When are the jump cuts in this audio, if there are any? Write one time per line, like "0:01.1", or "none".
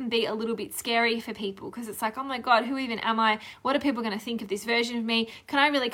none